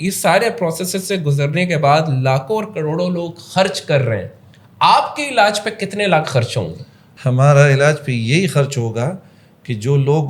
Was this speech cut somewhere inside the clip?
no; 0 cuts

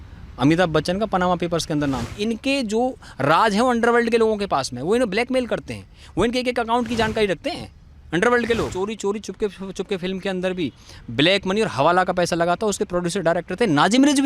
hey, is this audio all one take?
no; 2 cuts; at 2.1 s, 8.7 s

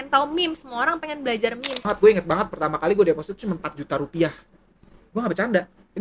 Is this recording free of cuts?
no; 1 cut; at 1.8 s

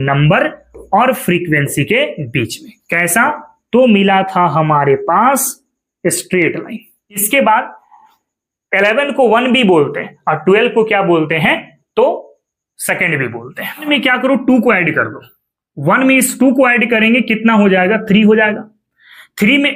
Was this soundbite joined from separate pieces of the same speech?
yes; 2 cuts; at 7.2 s, 13.8 s

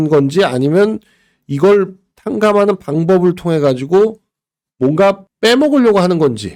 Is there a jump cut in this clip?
no; 0 cuts

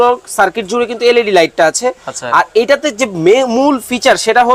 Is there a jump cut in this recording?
no; 0 cuts

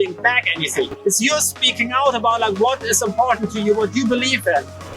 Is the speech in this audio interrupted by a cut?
yes; 1 cut; at 0.9 s

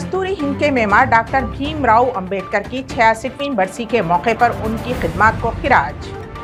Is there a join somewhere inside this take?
no; 0 cuts

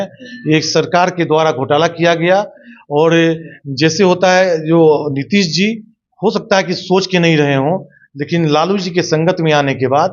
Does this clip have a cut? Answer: no; 0 cuts

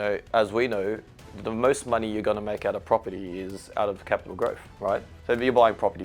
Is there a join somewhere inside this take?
yes; 1 cut; at 5.1 s

